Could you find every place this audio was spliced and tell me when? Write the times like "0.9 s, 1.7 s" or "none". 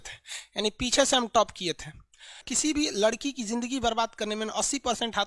2.5 s